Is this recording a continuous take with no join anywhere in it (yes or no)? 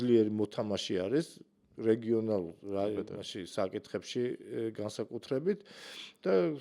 yes